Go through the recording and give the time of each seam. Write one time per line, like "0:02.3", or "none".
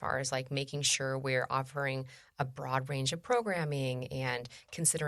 none

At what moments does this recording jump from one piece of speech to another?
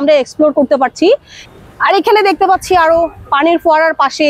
0:01.3

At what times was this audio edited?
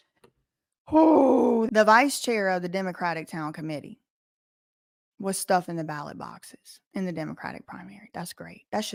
none

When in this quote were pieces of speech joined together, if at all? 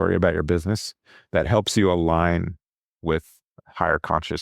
none

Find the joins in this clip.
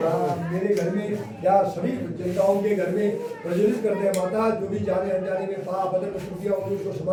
none

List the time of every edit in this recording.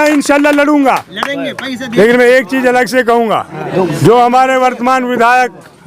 0:01.8
0:03.6

